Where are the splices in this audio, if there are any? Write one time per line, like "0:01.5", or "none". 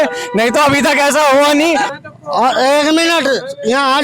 0:01.9